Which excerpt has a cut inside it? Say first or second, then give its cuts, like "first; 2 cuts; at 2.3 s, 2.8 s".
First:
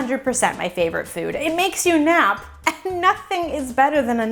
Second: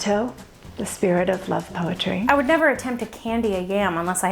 second; 1 cut; at 2.3 s